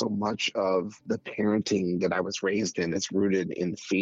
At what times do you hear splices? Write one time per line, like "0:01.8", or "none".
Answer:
0:01.0